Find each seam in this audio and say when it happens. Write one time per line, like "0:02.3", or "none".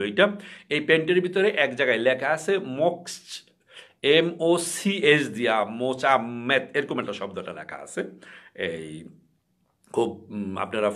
none